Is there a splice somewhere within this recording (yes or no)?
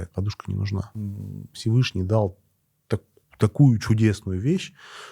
yes